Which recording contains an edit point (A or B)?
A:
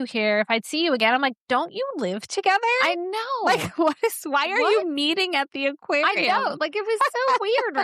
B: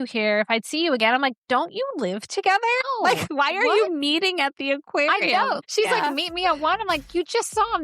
B